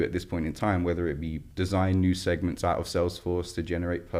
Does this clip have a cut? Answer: no; 0 cuts

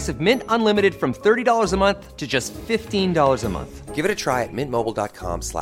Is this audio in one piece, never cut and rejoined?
yes; 0 cuts

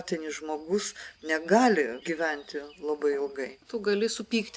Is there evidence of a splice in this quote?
yes; 2 cuts; at 2.0 s, 3.6 s

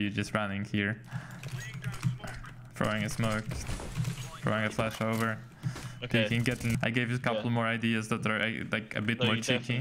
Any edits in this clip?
yes; 1 cut; at 6.8 s

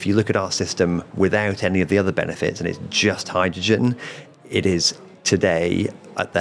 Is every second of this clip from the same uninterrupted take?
yes; 0 cuts

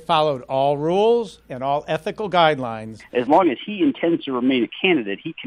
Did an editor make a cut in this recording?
yes; 1 cut; at 3.0 s

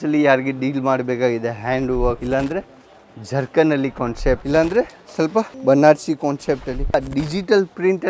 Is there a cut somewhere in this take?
yes; 4 cuts; at 2.2 s, 4.4 s, 5.5 s, 6.9 s

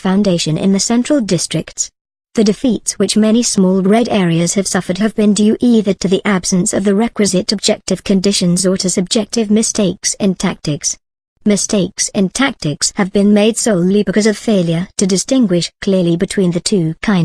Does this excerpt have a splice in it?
yes; 1 cut; at 1.2 s

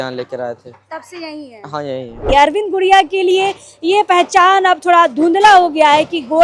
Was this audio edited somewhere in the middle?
yes; 1 cut; at 2.3 s

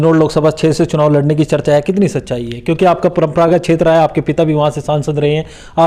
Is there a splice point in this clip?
no; 0 cuts

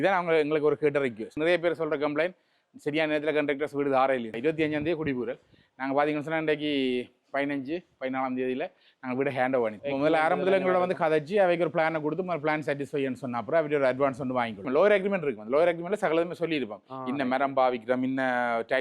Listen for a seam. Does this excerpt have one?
yes; 4 cuts; at 1.4 s, 4.4 s, 9.8 s, 14.6 s

